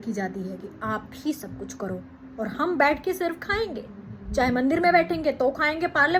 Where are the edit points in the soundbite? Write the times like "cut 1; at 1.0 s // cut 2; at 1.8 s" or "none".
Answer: none

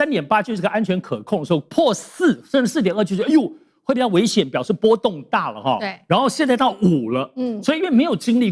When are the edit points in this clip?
none

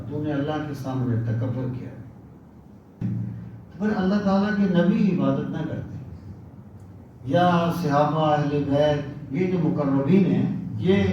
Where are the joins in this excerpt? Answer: cut 1; at 3.0 s

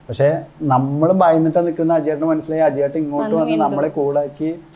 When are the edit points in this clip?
none

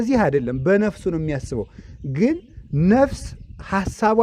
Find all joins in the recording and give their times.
none

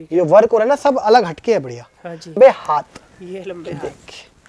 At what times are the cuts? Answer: cut 1; at 2.4 s

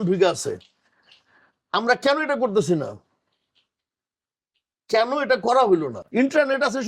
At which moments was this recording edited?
cut 1; at 6.0 s

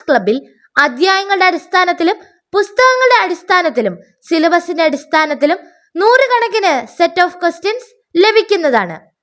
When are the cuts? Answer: none

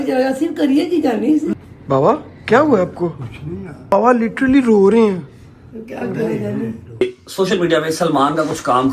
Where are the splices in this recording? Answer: cut 1; at 1.5 s // cut 2; at 3.9 s // cut 3; at 7.0 s

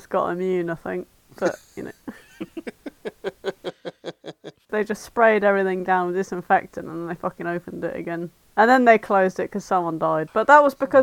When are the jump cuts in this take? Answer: cut 1; at 4.2 s // cut 2; at 8.4 s

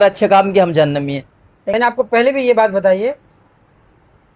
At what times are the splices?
none

